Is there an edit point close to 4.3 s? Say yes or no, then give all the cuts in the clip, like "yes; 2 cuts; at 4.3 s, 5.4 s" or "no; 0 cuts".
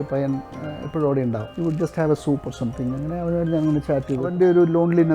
yes; 2 cuts; at 1.5 s, 4.3 s